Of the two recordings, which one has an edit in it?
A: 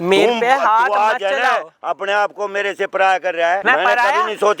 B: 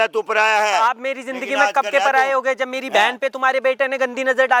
A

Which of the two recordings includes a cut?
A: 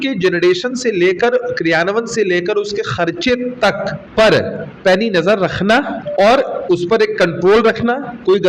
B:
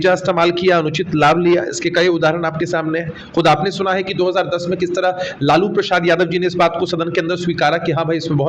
A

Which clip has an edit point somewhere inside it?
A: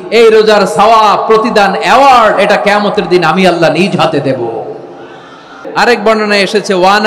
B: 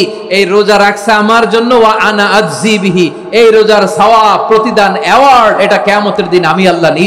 A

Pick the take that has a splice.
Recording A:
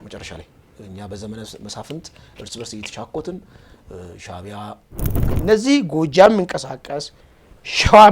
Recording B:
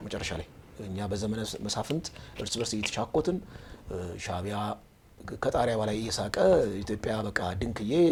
A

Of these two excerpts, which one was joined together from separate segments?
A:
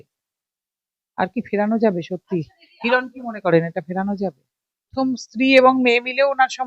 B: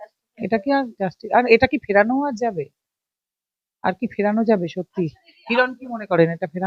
A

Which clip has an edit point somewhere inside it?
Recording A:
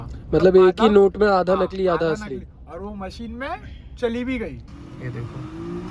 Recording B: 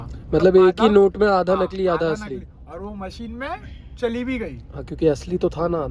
A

